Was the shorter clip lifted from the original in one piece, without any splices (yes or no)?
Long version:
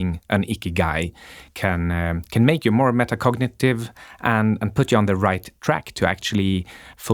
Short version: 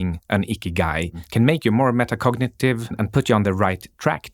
no